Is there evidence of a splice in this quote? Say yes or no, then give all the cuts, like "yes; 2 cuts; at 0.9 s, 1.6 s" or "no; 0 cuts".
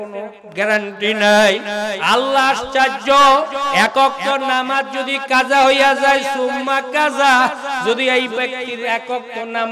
yes; 1 cut; at 2.0 s